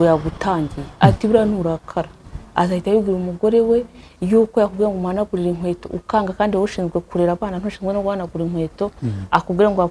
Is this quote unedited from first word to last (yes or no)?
yes